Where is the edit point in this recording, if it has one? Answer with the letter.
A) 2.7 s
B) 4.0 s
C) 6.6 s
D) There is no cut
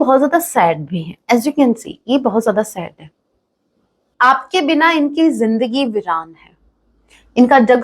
B